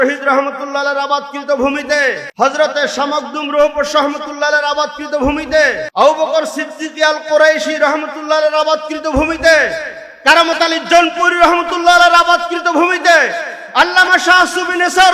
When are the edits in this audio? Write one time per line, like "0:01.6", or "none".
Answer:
0:02.2
0:05.8